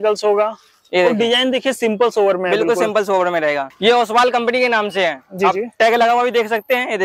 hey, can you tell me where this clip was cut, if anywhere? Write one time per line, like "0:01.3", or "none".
0:03.7